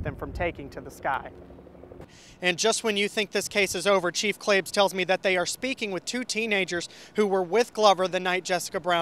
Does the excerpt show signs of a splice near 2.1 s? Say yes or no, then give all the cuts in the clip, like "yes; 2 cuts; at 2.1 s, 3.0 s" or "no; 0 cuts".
yes; 1 cut; at 2.1 s